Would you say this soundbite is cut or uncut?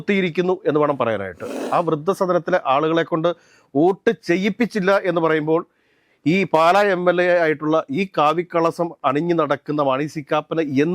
cut